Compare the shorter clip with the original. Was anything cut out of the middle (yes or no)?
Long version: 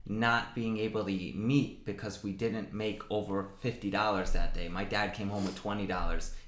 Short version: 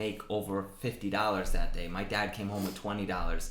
no